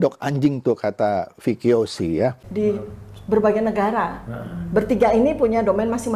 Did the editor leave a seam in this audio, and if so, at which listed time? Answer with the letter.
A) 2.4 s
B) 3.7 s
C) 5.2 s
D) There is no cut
A